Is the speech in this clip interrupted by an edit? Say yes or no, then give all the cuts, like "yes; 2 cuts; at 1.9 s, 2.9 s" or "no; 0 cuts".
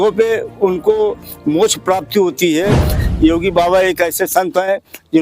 yes; 1 cut; at 2.9 s